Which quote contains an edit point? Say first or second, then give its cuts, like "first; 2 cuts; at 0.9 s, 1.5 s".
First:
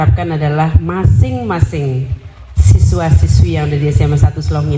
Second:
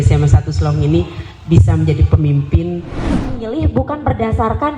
second; 1 cut; at 3.2 s